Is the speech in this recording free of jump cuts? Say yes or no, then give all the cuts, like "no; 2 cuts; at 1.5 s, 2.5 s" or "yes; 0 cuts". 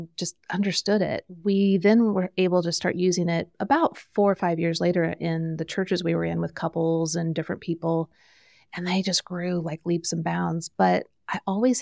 yes; 0 cuts